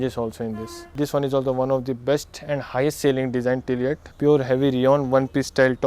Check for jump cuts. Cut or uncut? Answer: cut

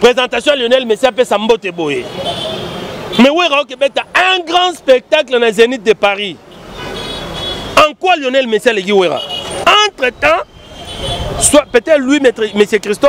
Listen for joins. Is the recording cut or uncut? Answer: cut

